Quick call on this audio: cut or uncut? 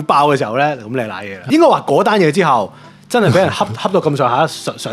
cut